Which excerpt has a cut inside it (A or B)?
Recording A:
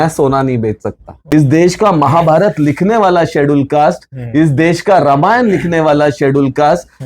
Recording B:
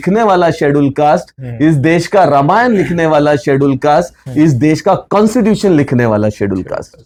A